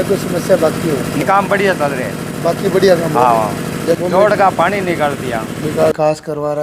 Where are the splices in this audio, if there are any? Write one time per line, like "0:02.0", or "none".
0:01.2
0:04.0
0:05.9

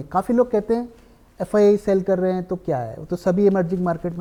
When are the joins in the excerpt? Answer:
none

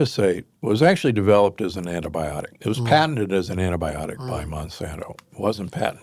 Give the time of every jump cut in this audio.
none

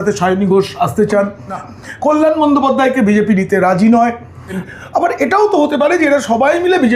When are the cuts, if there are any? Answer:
0:01.7
0:04.6

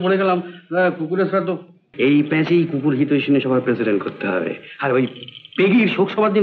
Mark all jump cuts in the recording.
0:01.9

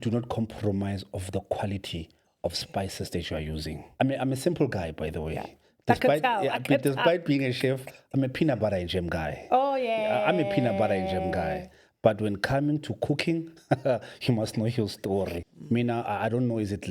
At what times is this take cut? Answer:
0:03.8
0:15.5

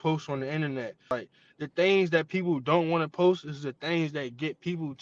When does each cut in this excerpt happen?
0:01.1

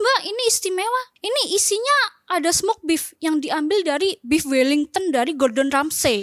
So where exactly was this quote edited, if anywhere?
0:01.1

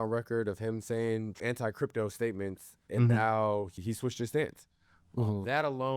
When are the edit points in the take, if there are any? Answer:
0:01.4
0:03.8

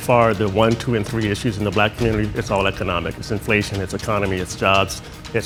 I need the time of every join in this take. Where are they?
none

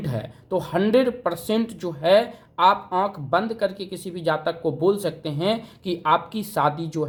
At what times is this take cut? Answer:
none

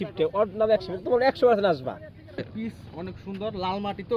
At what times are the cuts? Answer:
0:02.5

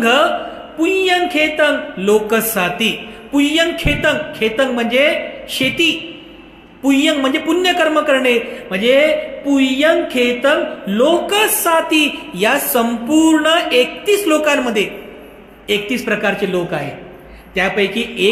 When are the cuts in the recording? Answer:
none

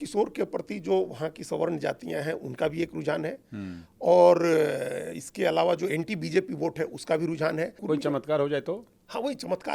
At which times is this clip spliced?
0:07.8

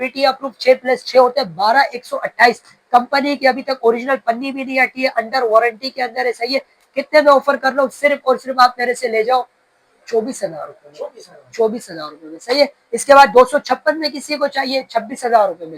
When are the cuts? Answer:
none

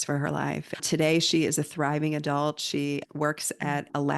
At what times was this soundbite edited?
none

